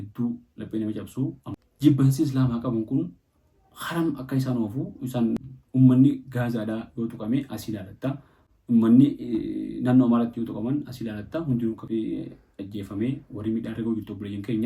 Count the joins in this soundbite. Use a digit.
3